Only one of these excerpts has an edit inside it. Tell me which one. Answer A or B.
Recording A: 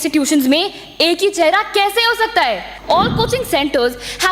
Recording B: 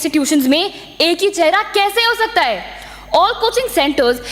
A